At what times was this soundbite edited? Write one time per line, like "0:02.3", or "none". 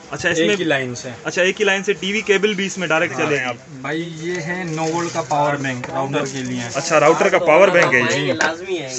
0:03.7